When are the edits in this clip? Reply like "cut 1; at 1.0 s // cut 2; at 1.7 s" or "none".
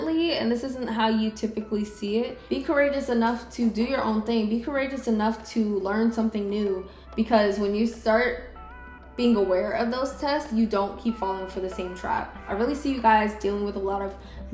cut 1; at 2.4 s // cut 2; at 7.0 s // cut 3; at 12.5 s